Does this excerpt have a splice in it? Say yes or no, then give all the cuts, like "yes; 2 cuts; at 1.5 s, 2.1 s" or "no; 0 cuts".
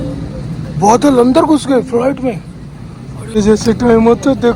yes; 1 cut; at 3.1 s